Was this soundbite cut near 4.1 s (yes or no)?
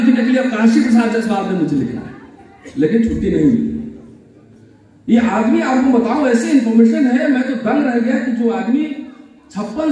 no